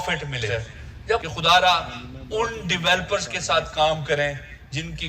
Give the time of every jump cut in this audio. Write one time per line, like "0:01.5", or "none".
0:01.2